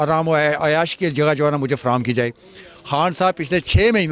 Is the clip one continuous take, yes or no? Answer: yes